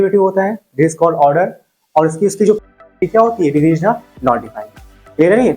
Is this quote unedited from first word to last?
no; 1 cut; at 2.6 s

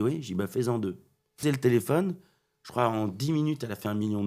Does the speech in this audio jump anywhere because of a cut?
yes; 1 cut; at 1.4 s

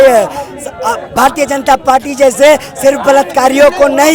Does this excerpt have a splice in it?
no; 0 cuts

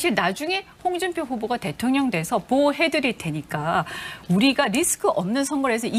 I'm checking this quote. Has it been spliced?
no; 0 cuts

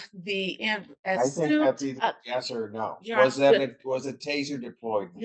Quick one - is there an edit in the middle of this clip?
no; 0 cuts

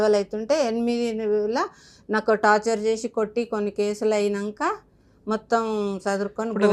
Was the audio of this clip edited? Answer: no; 0 cuts

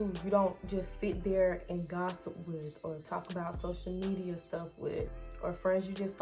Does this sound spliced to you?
yes; 1 cut; at 5.2 s

